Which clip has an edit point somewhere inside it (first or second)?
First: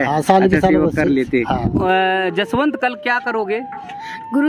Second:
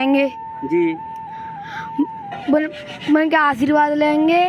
first